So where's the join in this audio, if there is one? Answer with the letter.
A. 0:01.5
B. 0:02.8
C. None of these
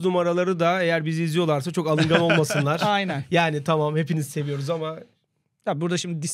C